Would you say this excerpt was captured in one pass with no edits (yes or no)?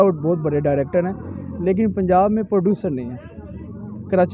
yes